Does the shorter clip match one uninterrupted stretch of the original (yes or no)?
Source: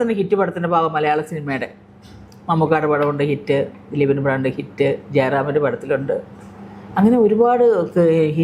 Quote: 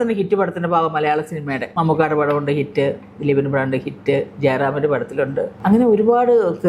no